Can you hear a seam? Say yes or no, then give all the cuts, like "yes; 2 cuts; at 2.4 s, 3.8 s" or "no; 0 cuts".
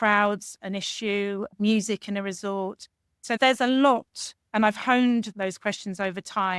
yes; 1 cut; at 5.3 s